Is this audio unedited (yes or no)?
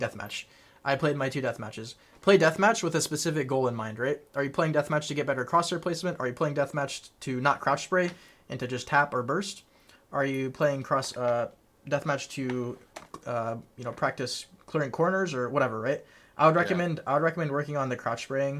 yes